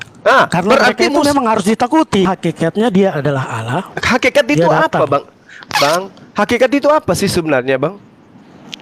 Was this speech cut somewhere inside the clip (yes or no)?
yes